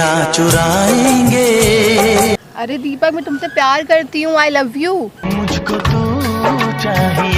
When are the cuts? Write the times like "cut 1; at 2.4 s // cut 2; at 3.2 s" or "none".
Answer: cut 1; at 2.4 s